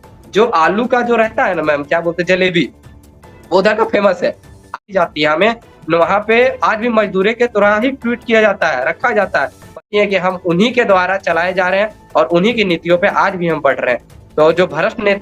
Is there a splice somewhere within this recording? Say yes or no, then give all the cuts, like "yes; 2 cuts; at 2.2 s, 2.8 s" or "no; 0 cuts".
yes; 2 cuts; at 4.8 s, 9.7 s